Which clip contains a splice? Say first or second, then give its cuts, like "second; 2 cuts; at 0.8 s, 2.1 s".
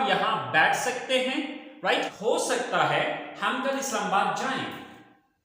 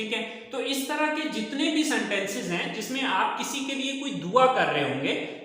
first; 1 cut; at 2.1 s